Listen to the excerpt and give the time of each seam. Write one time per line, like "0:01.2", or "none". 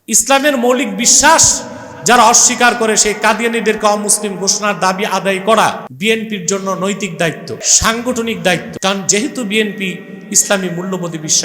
0:05.9
0:07.7
0:08.7